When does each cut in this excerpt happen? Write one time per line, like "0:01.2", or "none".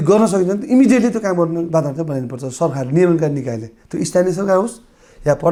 none